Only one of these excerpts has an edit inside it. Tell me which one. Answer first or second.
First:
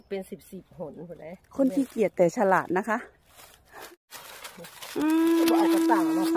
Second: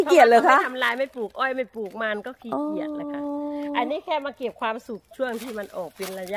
first